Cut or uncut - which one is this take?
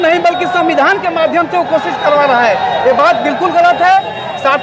uncut